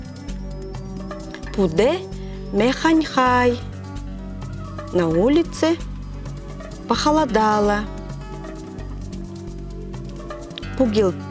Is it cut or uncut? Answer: uncut